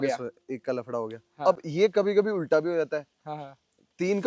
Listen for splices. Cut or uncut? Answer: uncut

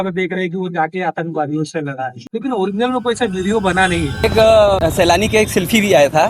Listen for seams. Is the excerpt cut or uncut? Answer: cut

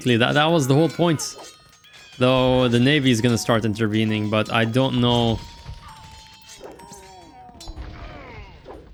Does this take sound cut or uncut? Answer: uncut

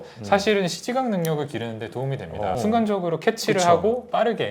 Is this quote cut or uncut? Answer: cut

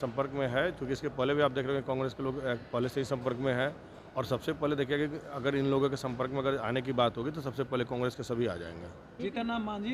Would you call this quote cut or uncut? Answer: cut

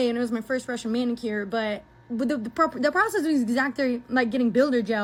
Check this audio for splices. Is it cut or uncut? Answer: uncut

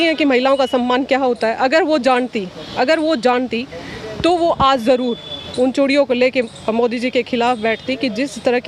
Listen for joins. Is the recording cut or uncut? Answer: uncut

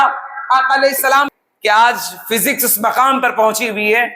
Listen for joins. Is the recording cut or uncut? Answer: cut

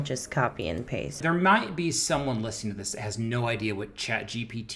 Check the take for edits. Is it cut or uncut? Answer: cut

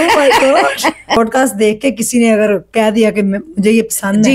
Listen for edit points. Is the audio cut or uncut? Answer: cut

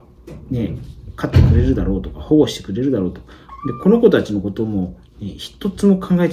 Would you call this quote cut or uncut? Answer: uncut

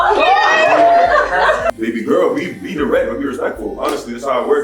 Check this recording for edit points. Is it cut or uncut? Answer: cut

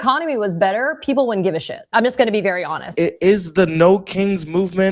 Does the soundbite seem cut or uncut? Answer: cut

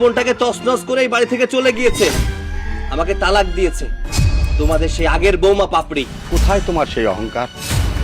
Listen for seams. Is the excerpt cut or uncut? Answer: cut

